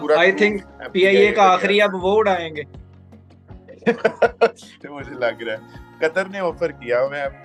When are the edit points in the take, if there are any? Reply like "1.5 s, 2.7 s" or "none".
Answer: none